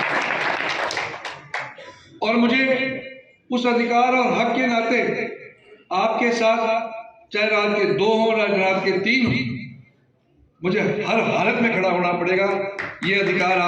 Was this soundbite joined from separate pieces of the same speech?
no; 0 cuts

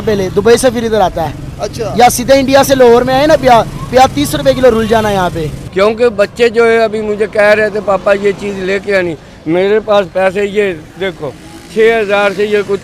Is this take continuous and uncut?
no; 1 cut; at 5.5 s

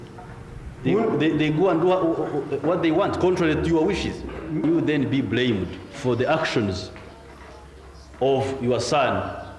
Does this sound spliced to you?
no; 0 cuts

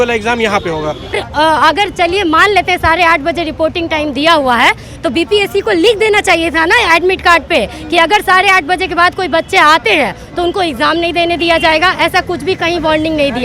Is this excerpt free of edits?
no; 1 cut; at 1.2 s

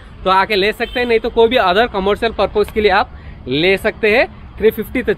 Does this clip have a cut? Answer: no; 0 cuts

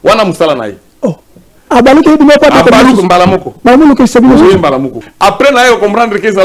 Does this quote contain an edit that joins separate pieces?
yes; 1 cut; at 5.1 s

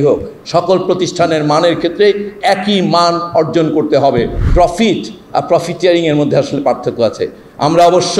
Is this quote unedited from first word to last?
no; 1 cut; at 4.5 s

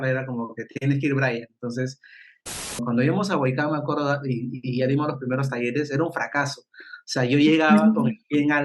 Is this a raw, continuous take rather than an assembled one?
no; 1 cut; at 2.5 s

